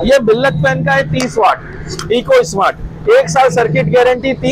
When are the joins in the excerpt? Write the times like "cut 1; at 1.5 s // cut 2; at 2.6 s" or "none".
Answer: none